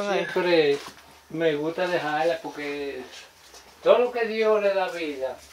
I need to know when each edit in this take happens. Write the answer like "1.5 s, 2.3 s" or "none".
none